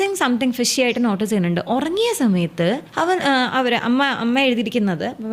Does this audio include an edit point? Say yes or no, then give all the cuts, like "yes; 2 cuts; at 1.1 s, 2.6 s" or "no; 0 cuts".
yes; 1 cut; at 2.9 s